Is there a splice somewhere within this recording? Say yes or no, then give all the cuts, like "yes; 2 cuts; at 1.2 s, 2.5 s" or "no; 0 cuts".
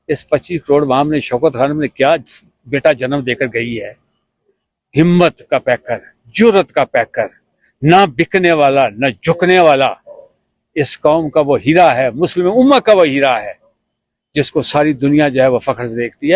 no; 0 cuts